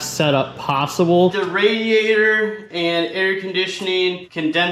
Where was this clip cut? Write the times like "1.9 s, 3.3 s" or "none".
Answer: 1.3 s